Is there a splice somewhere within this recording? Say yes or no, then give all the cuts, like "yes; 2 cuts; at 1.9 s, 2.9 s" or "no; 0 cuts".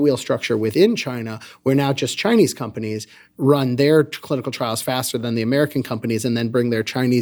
no; 0 cuts